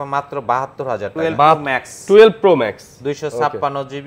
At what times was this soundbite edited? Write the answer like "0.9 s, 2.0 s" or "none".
1.6 s